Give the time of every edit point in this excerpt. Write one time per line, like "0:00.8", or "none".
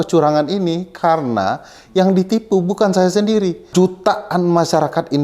0:03.6